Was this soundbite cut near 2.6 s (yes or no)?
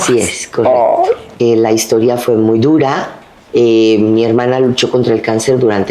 no